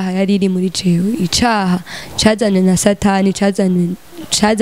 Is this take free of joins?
yes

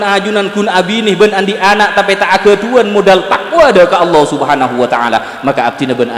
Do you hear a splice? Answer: no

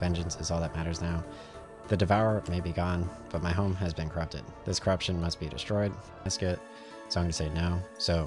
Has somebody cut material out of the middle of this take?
yes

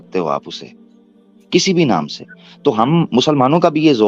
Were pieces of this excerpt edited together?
no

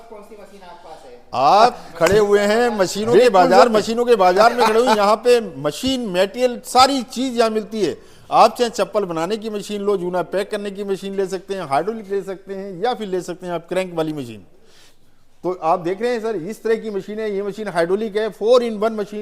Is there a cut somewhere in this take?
yes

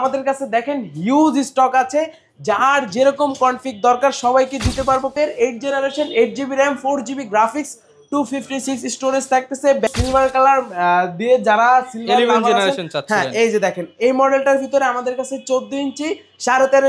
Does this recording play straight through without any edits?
no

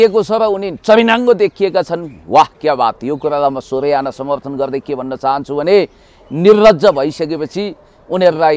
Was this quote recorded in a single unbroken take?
yes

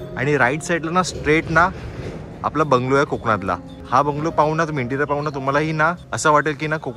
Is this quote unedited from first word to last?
no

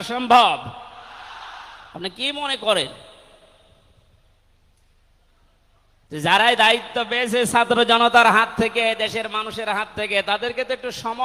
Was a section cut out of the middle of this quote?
no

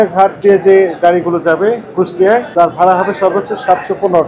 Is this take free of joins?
no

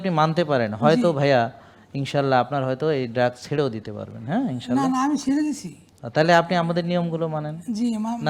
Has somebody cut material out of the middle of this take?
no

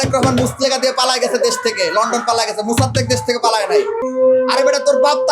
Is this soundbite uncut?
no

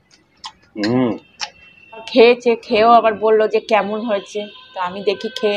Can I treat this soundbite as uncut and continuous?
no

